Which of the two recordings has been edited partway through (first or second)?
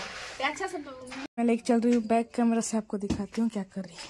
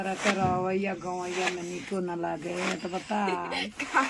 first